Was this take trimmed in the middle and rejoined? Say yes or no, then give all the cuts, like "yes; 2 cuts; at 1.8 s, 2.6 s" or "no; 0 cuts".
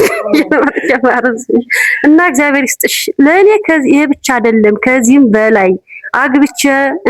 no; 0 cuts